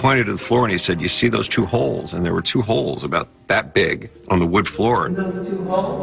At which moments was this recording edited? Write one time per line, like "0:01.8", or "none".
0:04.1
0:05.1